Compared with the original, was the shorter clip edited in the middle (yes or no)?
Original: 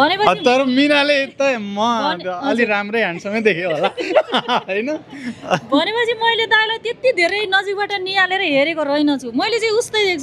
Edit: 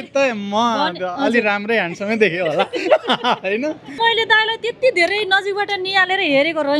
yes